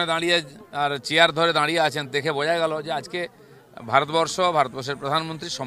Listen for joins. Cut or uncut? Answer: uncut